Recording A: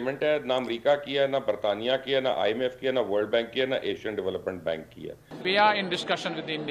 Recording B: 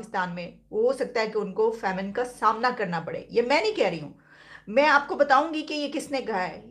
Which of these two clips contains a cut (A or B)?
A